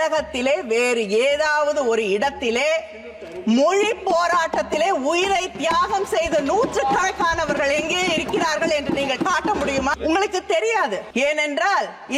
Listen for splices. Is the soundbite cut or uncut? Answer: cut